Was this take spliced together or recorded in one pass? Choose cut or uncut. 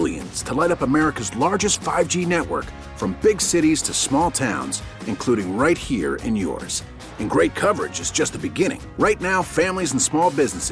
uncut